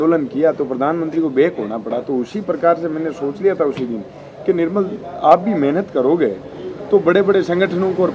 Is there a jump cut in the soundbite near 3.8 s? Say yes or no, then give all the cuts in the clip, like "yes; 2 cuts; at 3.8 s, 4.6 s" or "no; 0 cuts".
no; 0 cuts